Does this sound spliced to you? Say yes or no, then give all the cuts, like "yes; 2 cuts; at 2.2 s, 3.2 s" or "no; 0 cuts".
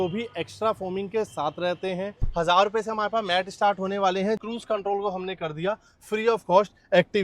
yes; 2 cuts; at 2.2 s, 4.4 s